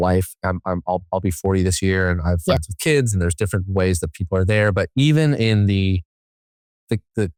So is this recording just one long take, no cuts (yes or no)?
yes